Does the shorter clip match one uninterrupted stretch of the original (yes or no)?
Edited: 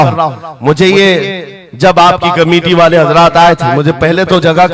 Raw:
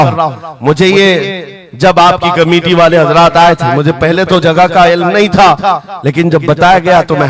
yes